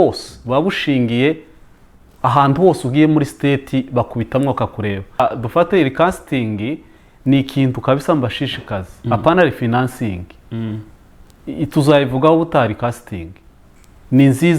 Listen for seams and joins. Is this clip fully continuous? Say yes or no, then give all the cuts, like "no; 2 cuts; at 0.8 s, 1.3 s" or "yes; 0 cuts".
no; 1 cut; at 5.2 s